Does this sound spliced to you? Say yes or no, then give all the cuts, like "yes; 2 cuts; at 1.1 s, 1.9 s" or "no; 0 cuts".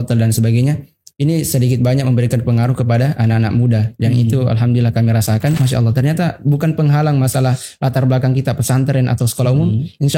yes; 1 cut; at 5.6 s